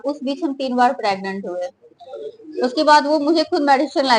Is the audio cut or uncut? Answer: uncut